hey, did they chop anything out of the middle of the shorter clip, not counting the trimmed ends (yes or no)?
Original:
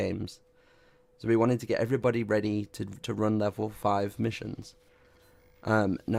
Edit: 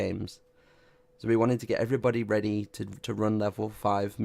no